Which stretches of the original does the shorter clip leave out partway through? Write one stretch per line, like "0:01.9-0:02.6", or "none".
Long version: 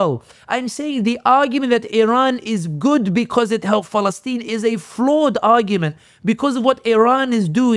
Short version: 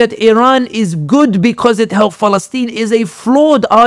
none